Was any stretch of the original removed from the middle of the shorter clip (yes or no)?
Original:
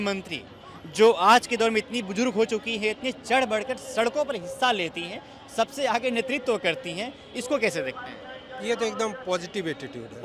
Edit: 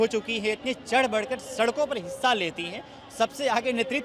no